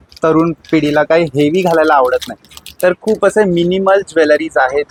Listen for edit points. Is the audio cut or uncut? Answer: uncut